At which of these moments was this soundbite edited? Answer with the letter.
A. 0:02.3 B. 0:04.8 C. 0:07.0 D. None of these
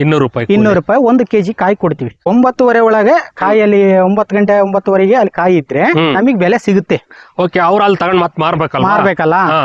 A